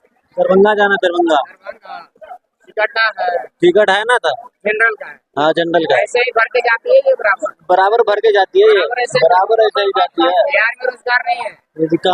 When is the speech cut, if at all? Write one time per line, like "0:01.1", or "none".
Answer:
none